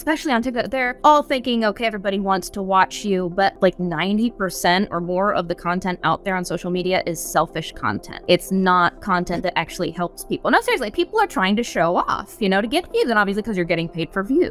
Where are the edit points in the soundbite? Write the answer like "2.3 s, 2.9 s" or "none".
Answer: 0.9 s, 3.6 s, 8.1 s

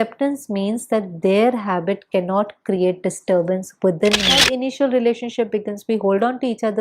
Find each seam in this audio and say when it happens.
4.4 s

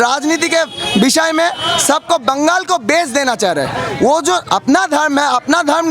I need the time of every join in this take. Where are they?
none

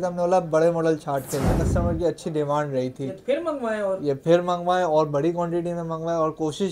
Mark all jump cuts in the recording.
1.6 s

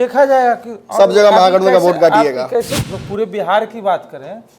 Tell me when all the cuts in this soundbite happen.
2.7 s

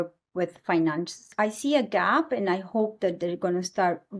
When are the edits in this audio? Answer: 1.3 s

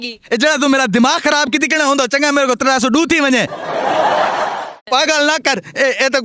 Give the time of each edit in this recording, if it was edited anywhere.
3.6 s, 4.8 s

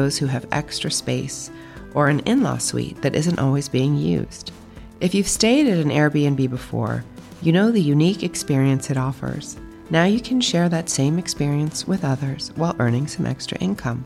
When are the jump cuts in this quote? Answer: none

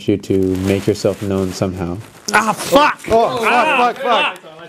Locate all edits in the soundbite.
2.1 s

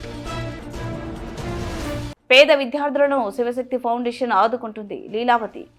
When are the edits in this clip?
none

